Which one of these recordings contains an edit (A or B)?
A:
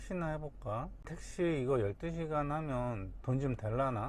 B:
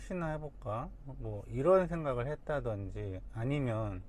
A